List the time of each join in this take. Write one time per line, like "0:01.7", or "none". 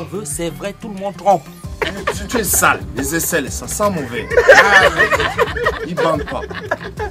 0:01.8